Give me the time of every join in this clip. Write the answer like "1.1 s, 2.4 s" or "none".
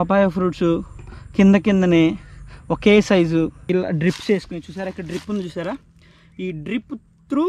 3.6 s

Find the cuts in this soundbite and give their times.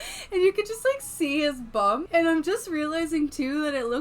2.0 s

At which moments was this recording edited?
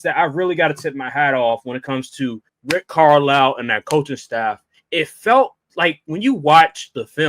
2.5 s, 4.7 s

